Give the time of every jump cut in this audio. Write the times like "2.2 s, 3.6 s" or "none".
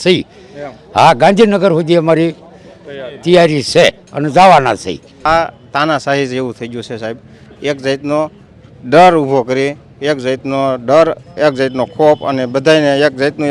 5.2 s